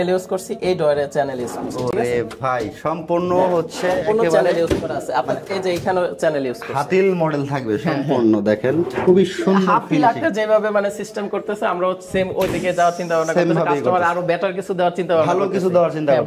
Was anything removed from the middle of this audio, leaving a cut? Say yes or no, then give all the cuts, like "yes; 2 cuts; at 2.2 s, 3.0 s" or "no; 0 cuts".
no; 0 cuts